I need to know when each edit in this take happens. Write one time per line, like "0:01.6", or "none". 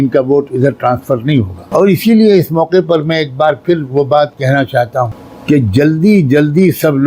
0:01.6
0:05.3